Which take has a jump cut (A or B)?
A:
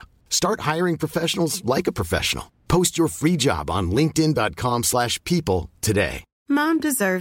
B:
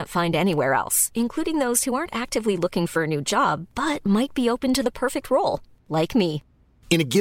A